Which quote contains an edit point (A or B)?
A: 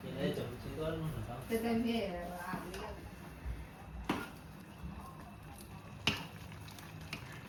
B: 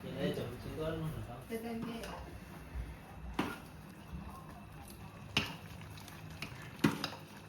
B